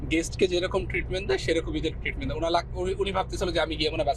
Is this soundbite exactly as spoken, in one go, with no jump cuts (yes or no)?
yes